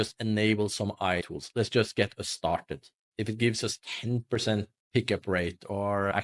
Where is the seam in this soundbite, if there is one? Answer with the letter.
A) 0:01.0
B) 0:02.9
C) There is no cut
C